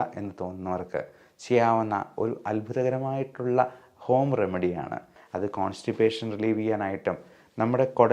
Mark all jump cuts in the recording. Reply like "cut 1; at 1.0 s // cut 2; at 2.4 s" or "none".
cut 1; at 5.1 s